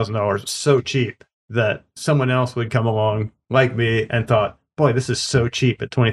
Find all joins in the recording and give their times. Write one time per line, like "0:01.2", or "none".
none

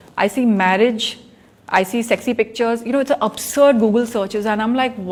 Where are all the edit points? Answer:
none

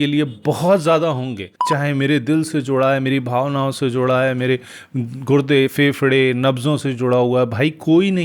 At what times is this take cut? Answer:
0:01.5

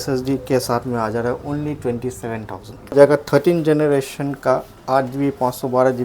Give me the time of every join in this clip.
0:02.9

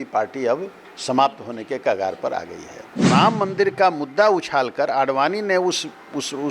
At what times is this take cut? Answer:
0:03.1

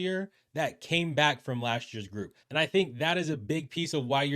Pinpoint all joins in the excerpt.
0:02.4

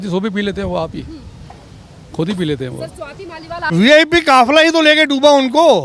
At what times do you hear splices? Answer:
0:03.7

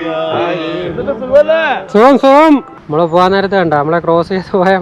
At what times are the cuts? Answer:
0:02.8

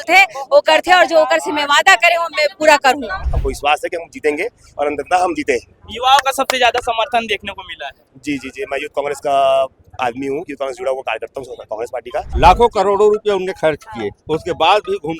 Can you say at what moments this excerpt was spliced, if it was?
0:03.3
0:12.2

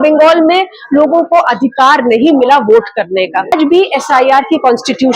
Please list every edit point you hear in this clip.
0:03.5

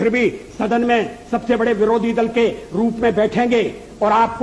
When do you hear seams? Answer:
none

